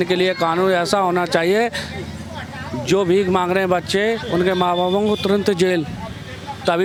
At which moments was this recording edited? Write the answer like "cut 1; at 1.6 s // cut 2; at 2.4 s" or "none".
none